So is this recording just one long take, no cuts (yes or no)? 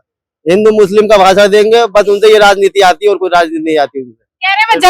yes